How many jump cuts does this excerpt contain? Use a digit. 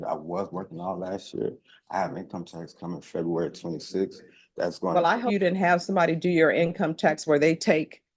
1